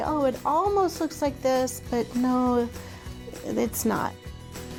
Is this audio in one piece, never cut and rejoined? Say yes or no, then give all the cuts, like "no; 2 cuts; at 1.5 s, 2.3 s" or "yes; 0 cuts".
yes; 0 cuts